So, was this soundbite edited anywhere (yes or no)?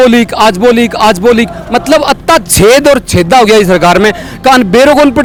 no